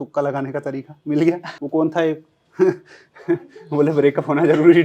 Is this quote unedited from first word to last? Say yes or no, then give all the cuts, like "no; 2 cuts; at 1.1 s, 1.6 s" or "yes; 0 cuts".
no; 1 cut; at 1.5 s